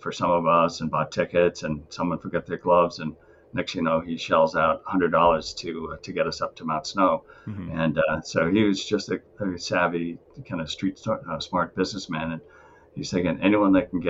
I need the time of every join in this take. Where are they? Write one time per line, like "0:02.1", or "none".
none